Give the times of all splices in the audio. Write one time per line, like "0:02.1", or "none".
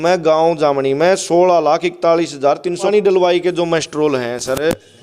0:02.9